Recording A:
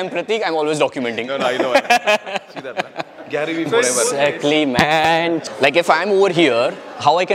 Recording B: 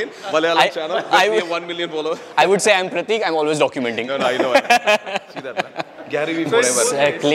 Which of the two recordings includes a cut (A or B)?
A